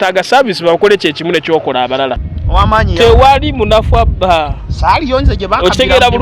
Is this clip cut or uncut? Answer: cut